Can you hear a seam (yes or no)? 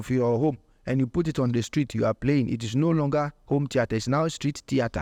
no